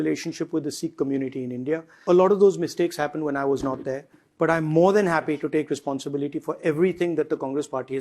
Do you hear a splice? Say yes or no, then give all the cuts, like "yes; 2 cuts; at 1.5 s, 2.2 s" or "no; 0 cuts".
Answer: yes; 1 cut; at 2.0 s